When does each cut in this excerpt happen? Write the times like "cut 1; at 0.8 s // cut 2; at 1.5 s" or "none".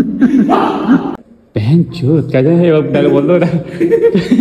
cut 1; at 1.1 s

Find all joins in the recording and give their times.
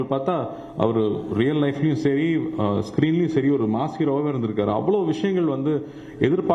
none

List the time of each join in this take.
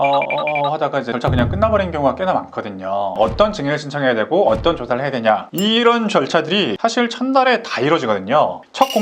cut 1; at 3.1 s

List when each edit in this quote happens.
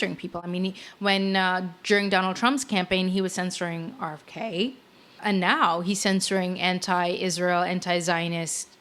none

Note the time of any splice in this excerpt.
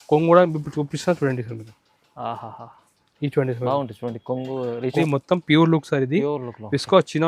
cut 1; at 5.0 s

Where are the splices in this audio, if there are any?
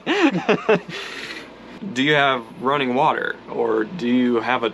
cut 1; at 1.8 s

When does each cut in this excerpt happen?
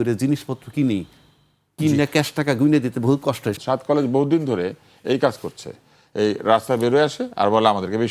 cut 1; at 3.5 s

